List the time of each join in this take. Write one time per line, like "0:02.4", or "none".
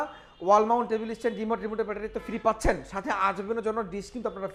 none